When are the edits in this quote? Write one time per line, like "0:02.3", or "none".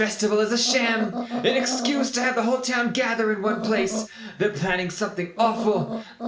none